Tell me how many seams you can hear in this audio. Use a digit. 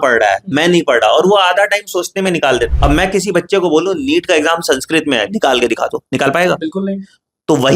1